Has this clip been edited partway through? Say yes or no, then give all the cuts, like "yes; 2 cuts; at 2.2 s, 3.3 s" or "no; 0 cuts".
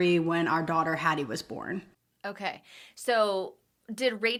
no; 0 cuts